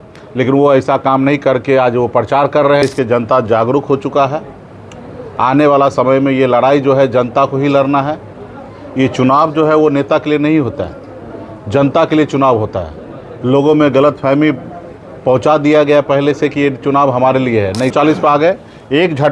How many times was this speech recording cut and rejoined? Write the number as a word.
two